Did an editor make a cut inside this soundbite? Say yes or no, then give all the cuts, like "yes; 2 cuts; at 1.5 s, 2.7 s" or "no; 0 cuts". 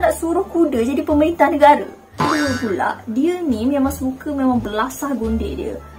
yes; 1 cut; at 2.1 s